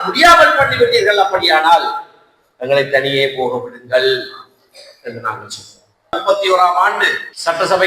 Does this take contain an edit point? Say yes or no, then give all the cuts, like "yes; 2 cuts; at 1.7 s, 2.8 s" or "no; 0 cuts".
yes; 1 cut; at 6.2 s